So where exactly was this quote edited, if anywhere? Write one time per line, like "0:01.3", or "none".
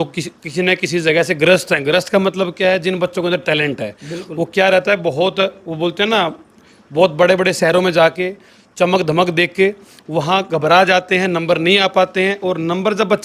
none